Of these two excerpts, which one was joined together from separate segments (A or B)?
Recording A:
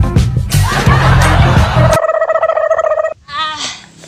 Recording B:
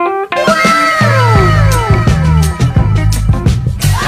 A